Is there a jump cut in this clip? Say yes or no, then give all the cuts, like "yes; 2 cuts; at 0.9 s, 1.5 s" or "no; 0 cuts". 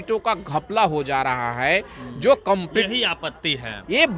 no; 0 cuts